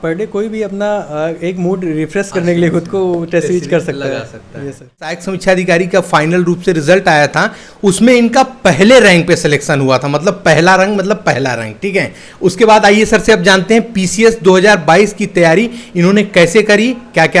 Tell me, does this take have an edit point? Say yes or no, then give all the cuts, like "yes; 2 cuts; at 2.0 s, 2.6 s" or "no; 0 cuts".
yes; 1 cut; at 5.3 s